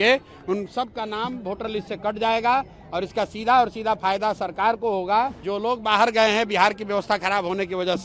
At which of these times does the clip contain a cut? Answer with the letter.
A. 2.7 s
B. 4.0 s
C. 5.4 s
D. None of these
C